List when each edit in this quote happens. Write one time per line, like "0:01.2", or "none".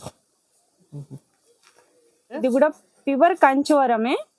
0:02.4